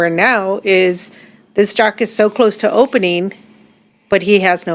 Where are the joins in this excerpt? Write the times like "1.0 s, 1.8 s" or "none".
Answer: none